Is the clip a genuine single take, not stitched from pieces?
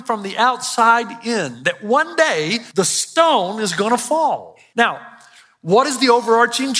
no; 2 cuts; at 2.6 s, 4.5 s

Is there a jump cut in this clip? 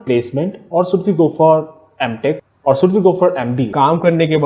yes; 2 cuts; at 2.5 s, 3.7 s

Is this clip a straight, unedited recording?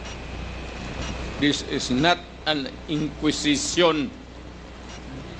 yes; 0 cuts

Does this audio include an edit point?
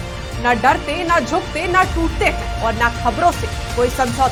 no; 0 cuts

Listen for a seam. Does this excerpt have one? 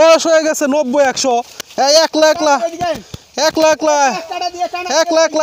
no; 0 cuts

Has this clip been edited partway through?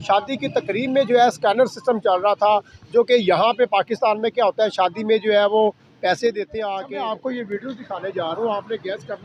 yes; 1 cut; at 6.8 s

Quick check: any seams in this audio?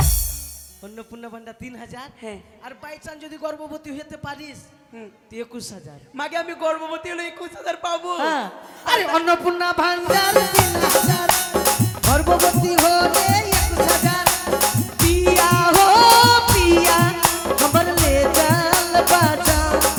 no; 0 cuts

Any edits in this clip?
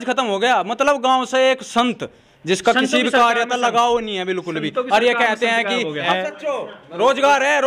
yes; 1 cut; at 6.1 s

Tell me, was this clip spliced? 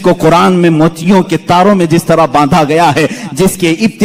no; 0 cuts

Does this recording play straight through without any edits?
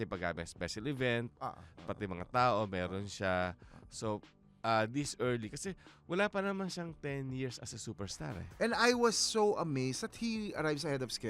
no; 1 cut; at 8.4 s

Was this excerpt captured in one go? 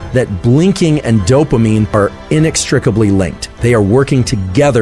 yes; 0 cuts

